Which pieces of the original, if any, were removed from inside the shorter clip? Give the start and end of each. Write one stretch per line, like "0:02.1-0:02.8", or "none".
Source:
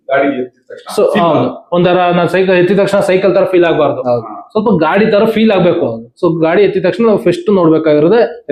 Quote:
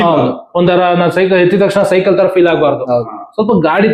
none